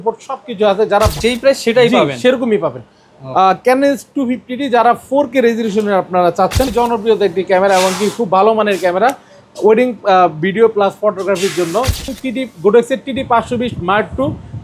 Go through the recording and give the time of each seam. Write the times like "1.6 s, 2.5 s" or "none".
1.1 s, 6.7 s, 12.1 s